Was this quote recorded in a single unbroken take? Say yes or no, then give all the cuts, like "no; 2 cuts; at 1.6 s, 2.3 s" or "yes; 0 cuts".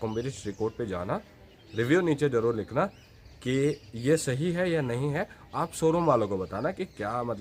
yes; 0 cuts